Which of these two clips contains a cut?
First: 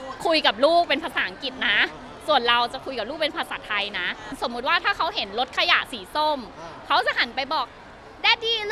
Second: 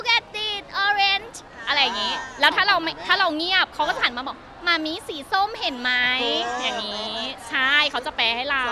first; 1 cut; at 4.3 s

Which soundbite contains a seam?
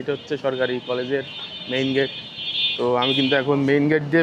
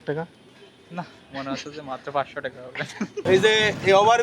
second; 1 cut; at 3.2 s

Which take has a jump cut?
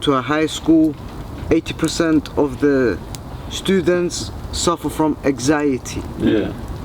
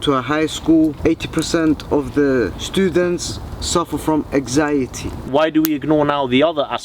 second; 3 cuts; at 1.0 s, 2.6 s, 5.3 s

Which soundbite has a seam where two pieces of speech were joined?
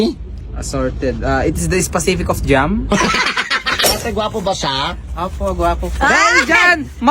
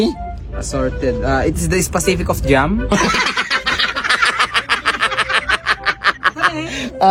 first; 1 cut; at 3.9 s

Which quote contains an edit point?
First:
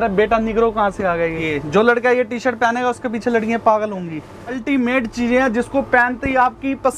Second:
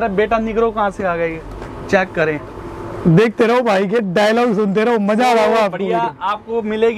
first; 2 cuts; at 1.4 s, 4.6 s

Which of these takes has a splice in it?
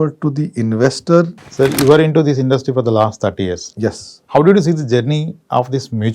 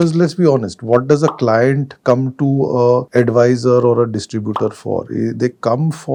first; 1 cut; at 1.4 s

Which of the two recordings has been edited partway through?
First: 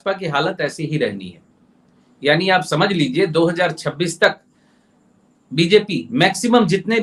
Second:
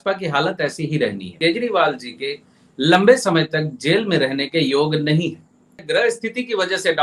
second; 2 cuts; at 1.3 s, 5.8 s

